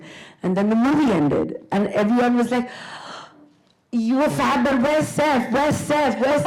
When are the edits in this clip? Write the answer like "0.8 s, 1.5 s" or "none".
none